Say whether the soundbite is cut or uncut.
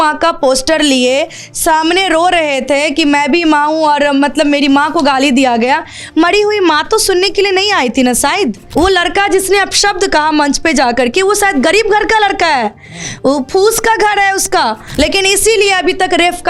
cut